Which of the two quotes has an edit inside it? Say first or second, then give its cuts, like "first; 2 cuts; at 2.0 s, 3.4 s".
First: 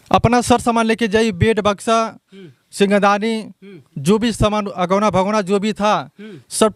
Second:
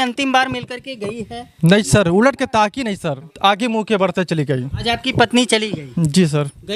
second; 2 cuts; at 3.3 s, 4.7 s